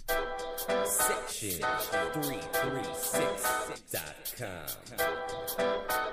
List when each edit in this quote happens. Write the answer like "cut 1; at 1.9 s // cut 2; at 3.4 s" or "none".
cut 1; at 1.1 s